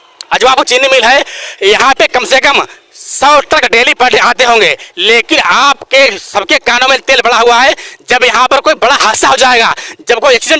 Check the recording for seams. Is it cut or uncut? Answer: uncut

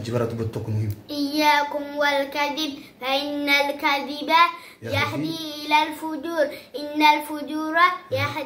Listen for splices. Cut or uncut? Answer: uncut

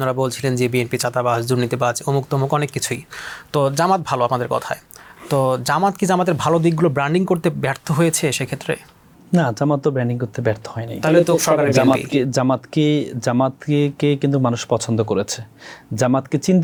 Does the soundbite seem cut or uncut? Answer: uncut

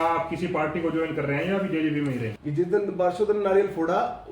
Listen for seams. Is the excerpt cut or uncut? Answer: cut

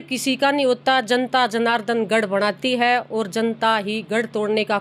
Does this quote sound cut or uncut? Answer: uncut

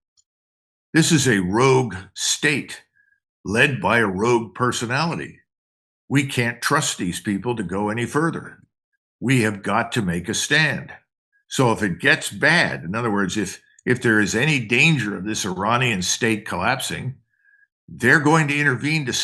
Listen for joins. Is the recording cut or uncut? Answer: uncut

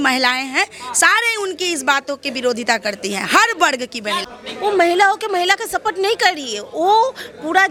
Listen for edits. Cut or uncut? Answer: uncut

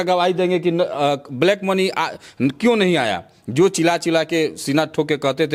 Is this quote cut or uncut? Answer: uncut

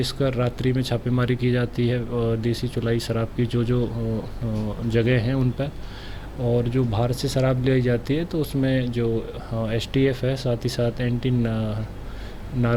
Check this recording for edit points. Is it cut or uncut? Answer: uncut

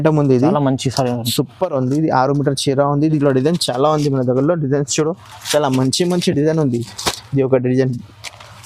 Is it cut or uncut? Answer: cut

